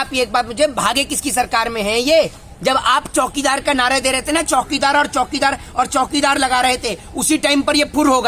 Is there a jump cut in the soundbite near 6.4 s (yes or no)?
no